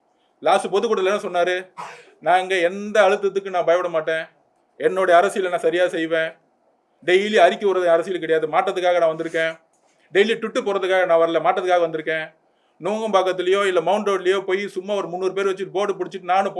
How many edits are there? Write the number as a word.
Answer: zero